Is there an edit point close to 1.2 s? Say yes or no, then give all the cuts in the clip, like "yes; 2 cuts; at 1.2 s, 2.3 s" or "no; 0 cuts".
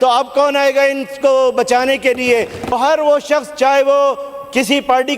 no; 1 cut; at 2.8 s